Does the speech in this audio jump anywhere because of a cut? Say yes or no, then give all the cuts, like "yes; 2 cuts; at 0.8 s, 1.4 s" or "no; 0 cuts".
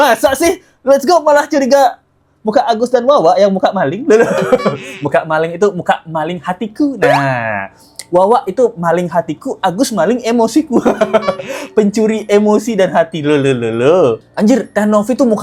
no; 0 cuts